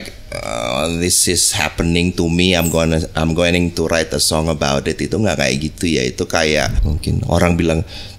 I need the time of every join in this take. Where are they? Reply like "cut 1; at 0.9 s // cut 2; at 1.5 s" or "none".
cut 1; at 6.9 s